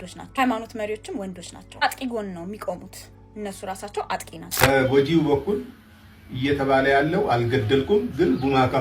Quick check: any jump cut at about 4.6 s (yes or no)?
yes